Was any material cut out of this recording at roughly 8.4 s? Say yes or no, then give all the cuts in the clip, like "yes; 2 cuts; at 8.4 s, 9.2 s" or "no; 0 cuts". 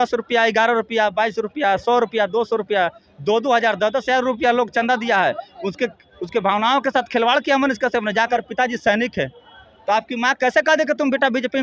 yes; 1 cut; at 8.4 s